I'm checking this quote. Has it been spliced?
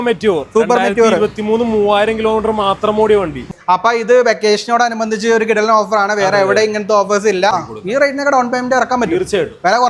yes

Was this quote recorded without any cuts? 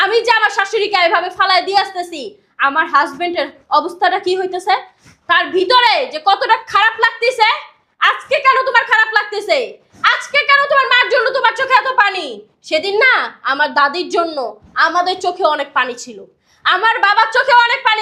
yes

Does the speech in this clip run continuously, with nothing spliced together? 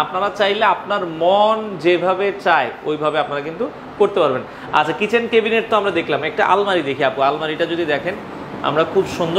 yes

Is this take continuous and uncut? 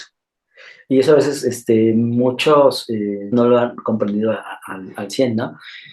no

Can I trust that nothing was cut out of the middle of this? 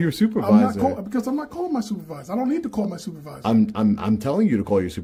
yes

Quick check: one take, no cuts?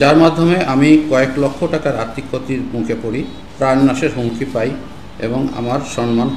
no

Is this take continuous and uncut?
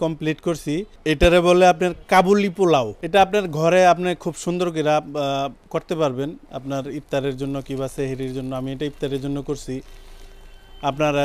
no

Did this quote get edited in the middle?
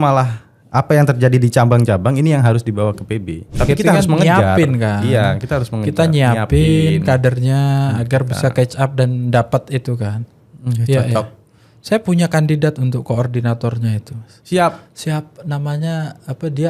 yes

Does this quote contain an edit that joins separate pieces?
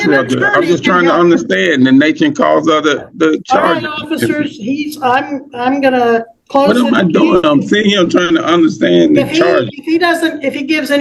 no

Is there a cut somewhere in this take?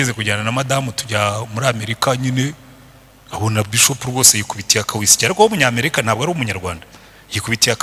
no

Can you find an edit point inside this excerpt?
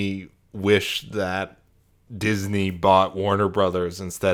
no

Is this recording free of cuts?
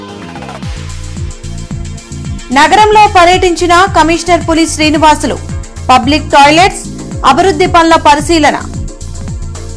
no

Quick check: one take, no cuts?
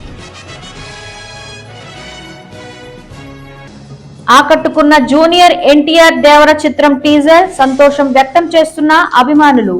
yes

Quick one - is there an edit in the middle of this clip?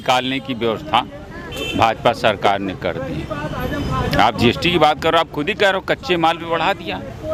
no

